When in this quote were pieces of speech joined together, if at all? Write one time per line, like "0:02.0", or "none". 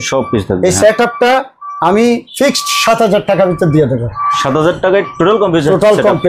none